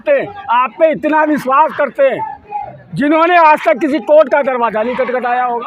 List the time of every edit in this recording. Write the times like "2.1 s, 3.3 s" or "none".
none